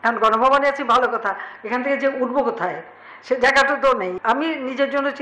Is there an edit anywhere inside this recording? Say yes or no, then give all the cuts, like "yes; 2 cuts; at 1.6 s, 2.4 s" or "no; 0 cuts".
yes; 1 cut; at 4.2 s